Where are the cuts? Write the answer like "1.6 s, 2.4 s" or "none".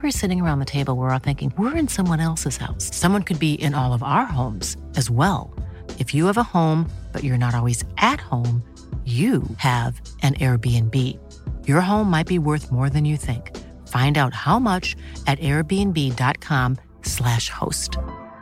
none